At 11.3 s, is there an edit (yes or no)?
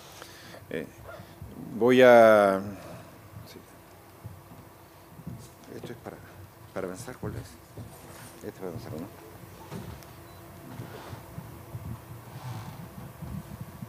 no